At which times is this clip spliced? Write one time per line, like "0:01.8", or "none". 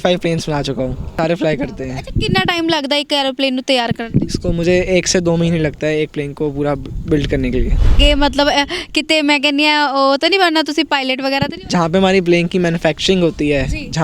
0:01.1
0:07.9
0:11.7